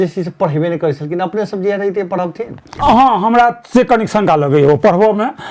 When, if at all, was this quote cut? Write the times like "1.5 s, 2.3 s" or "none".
2.7 s

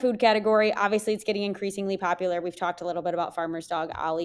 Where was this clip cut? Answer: none

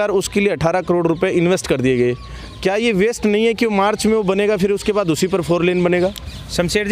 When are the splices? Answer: none

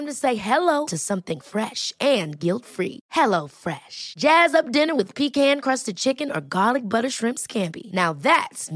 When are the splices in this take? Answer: none

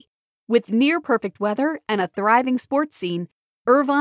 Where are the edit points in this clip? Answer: none

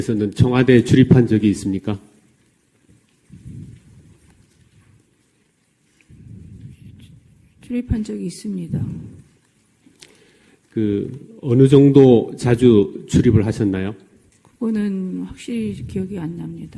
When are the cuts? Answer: none

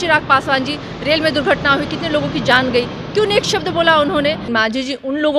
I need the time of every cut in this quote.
4.4 s

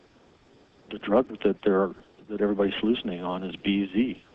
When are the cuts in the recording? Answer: none

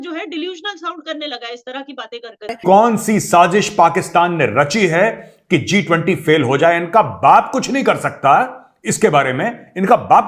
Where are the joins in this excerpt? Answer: 2.6 s

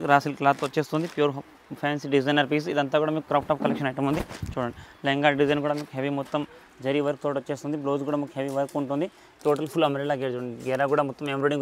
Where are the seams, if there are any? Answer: none

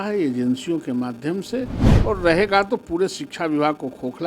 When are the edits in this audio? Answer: 1.8 s

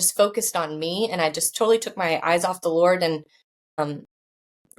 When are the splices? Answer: 3.8 s

